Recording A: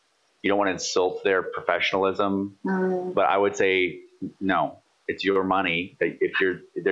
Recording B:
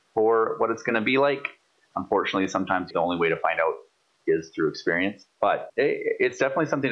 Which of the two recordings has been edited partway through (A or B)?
B